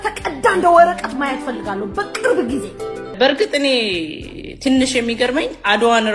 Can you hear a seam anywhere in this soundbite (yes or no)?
yes